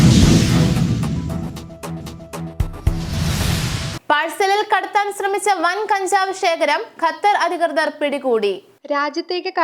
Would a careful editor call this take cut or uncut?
uncut